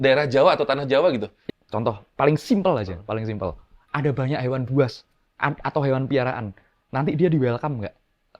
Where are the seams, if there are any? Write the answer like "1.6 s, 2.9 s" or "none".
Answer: 1.3 s